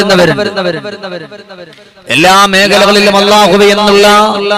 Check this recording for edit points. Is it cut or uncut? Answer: uncut